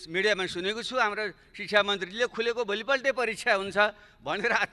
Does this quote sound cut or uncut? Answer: uncut